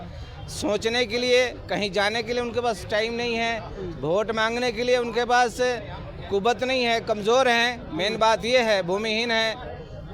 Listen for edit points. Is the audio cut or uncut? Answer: uncut